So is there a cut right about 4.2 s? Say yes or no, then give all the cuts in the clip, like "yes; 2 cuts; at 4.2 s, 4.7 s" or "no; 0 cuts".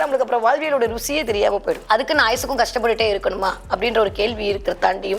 no; 1 cut; at 1.8 s